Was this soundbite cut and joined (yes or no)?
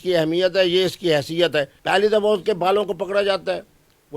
yes